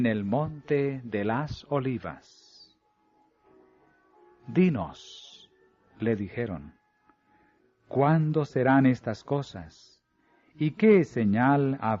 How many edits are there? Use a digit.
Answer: 1